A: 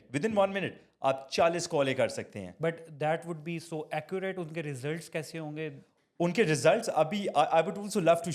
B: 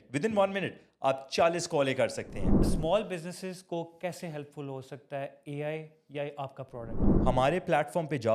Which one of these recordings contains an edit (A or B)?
B